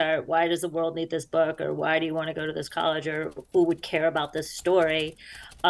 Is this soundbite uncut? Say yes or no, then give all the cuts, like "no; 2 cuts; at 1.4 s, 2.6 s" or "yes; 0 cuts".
yes; 0 cuts